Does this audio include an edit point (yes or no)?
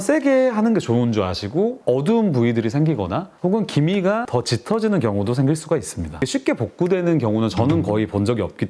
yes